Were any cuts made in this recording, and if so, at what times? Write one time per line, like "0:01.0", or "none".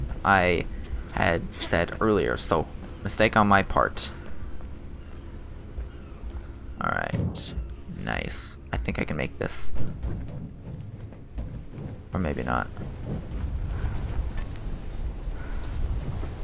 0:01.3